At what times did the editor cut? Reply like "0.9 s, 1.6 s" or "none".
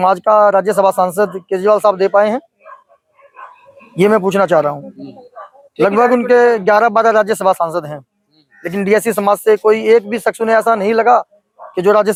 none